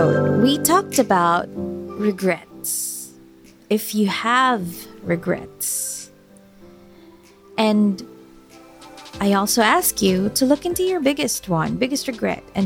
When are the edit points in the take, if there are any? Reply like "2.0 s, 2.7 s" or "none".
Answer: none